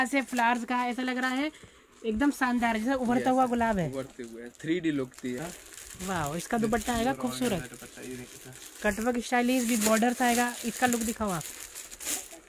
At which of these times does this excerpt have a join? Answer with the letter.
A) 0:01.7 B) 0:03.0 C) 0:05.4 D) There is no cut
C